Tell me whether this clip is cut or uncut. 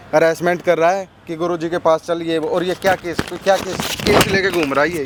uncut